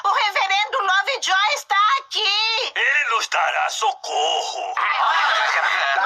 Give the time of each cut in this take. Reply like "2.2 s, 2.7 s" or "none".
3.7 s, 4.6 s